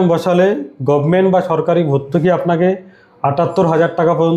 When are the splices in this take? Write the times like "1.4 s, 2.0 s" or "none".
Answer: none